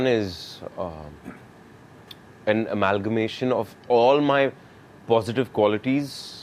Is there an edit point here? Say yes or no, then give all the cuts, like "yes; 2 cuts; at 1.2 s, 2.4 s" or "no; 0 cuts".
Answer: no; 0 cuts